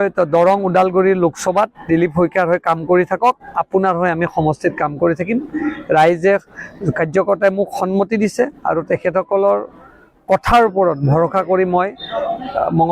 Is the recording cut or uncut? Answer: uncut